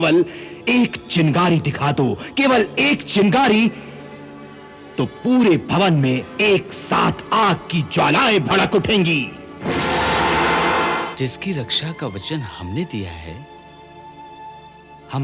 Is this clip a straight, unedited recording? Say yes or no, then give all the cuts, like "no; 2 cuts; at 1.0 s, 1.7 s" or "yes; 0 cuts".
no; 1 cut; at 11.0 s